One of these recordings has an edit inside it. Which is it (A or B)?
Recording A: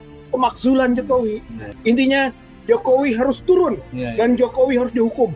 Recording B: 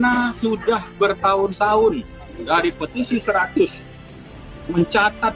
A